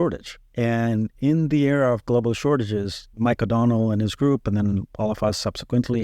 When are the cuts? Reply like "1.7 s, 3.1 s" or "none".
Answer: none